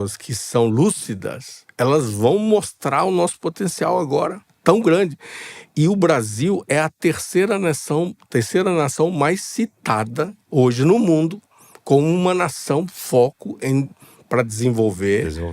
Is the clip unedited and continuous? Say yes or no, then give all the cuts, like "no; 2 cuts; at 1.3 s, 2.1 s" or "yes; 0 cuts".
yes; 0 cuts